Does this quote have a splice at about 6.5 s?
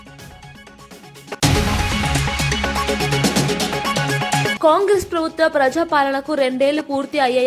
no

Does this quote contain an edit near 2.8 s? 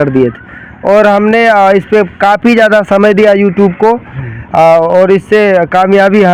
no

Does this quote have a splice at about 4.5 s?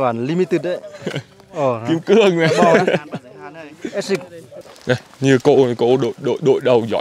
yes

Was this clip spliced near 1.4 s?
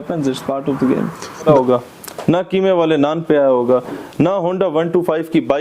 yes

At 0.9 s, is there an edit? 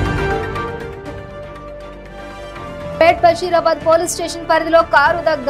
yes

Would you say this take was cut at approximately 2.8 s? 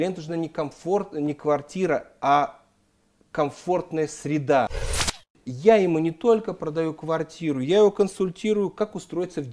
no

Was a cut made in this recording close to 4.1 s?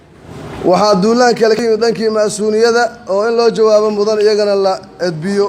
no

